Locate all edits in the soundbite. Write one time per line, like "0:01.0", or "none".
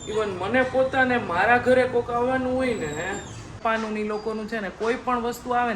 0:03.6